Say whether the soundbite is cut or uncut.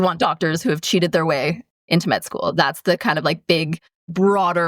cut